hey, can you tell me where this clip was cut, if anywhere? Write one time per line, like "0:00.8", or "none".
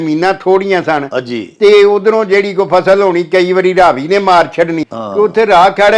0:04.8